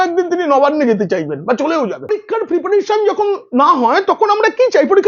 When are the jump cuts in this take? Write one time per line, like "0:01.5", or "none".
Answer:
0:02.1